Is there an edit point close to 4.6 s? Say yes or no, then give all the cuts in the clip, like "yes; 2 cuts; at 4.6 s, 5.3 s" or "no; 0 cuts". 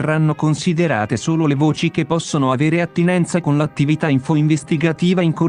no; 0 cuts